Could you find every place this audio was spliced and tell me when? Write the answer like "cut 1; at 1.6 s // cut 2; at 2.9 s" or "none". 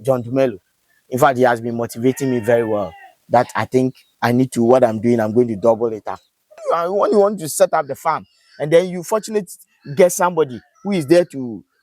cut 1; at 6.6 s

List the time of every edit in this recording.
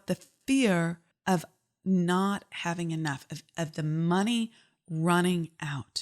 cut 1; at 1.1 s

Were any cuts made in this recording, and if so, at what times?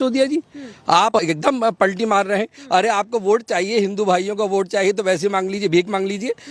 cut 1; at 1.2 s

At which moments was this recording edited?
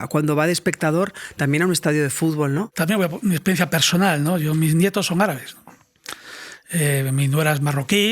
cut 1; at 2.7 s

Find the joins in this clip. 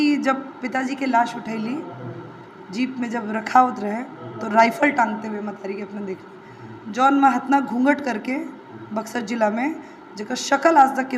none

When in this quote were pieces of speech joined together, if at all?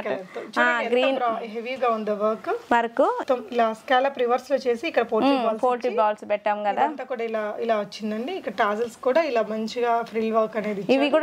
cut 1; at 3.2 s

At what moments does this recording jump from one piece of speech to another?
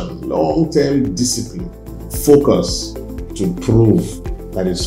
cut 1; at 3.2 s

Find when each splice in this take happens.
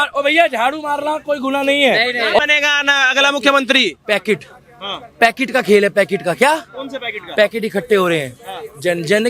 cut 1; at 2.4 s

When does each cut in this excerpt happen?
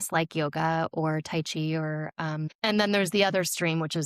cut 1; at 2.5 s

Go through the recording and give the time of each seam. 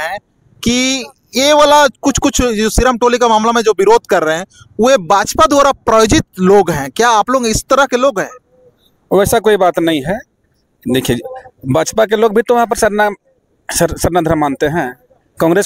none

